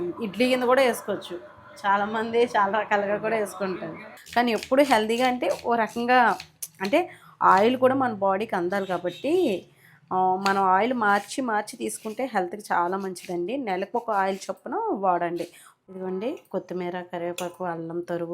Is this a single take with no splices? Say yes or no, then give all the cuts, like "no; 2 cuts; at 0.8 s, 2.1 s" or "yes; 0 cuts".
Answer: no; 2 cuts; at 4.1 s, 15.9 s